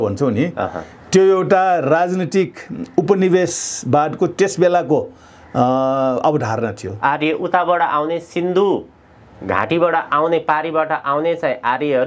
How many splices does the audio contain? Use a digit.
0